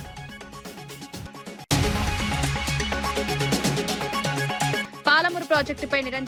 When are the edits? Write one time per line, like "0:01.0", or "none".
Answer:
none